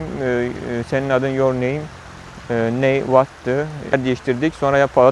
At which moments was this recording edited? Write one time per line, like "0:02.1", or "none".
0:03.9